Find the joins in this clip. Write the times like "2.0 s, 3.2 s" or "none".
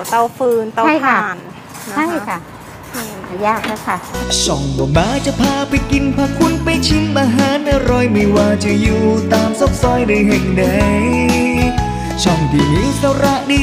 4.2 s